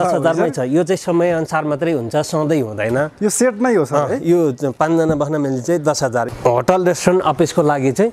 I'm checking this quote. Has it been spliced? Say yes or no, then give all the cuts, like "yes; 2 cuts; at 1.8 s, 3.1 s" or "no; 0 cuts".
yes; 1 cut; at 6.3 s